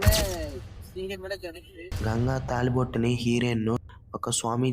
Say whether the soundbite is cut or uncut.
cut